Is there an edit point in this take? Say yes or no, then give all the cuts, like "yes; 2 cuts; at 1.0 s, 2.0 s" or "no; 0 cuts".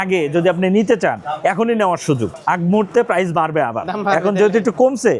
yes; 1 cut; at 2.3 s